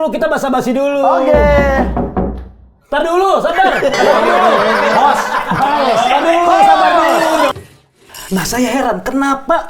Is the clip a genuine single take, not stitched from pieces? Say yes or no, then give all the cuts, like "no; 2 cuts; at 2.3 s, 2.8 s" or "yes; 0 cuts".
no; 1 cut; at 7.5 s